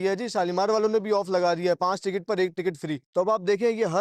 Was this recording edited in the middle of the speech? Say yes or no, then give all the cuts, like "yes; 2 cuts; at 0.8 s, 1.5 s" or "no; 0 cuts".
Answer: yes; 1 cut; at 2.9 s